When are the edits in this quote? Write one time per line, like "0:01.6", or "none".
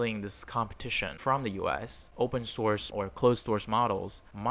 0:01.0
0:02.0
0:02.9